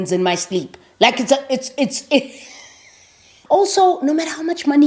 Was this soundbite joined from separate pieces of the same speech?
yes; 1 cut; at 3.3 s

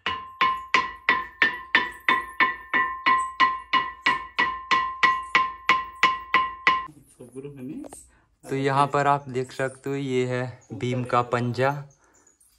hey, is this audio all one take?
yes; 0 cuts

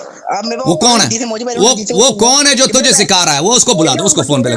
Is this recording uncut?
yes; 0 cuts

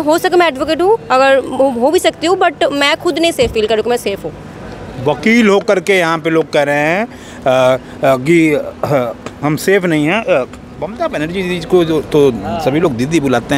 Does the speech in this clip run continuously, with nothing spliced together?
yes; 0 cuts

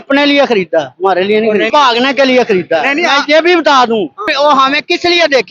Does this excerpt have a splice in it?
yes; 2 cuts; at 1.7 s, 4.2 s

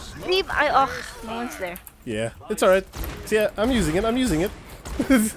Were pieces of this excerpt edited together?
no; 0 cuts

